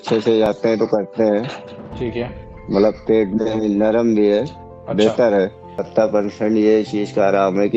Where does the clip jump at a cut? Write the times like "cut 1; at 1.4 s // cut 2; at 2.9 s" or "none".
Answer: cut 1; at 5.7 s

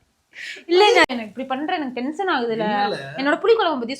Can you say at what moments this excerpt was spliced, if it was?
cut 1; at 1.1 s

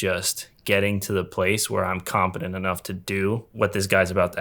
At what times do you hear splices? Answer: cut 1; at 3.5 s

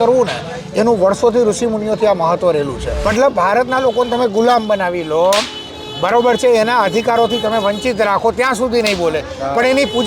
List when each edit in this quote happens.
cut 1; at 2.9 s

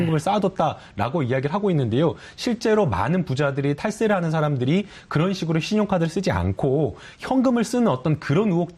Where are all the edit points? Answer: none

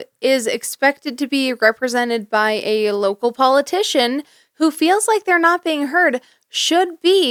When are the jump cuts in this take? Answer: none

